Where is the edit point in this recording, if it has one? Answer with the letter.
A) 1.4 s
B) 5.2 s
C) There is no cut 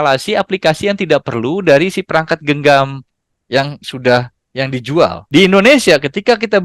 B